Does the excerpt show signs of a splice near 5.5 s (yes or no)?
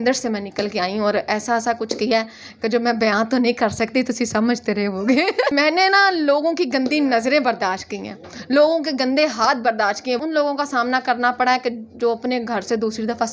yes